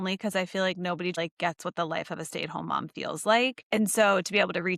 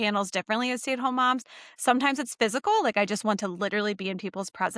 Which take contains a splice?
first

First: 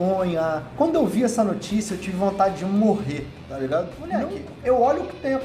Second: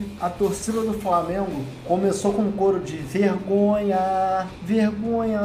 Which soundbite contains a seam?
first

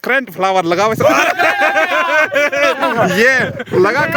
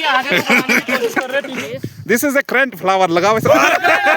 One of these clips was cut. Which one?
second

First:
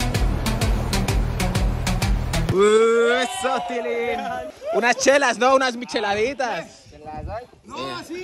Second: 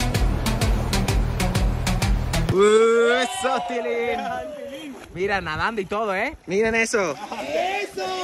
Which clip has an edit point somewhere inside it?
first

